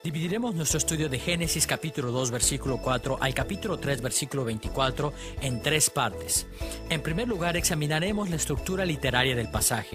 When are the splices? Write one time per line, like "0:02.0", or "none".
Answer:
none